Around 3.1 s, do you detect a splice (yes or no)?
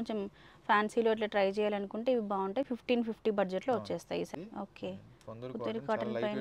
no